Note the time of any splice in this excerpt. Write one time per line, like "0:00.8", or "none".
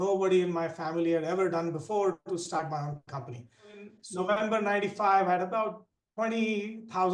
0:04.0